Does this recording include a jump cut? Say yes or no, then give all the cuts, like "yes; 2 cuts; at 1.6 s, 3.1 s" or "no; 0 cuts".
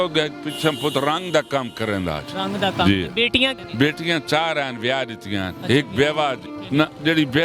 yes; 2 cuts; at 3.6 s, 6.5 s